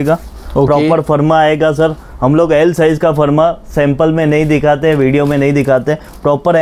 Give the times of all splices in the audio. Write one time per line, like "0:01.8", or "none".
none